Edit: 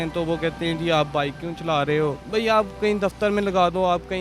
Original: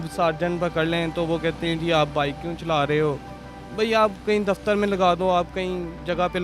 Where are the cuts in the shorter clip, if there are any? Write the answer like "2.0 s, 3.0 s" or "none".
2.2 s